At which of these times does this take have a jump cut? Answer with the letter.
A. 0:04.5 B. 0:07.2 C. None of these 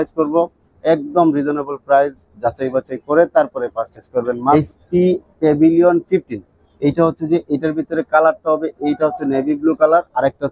A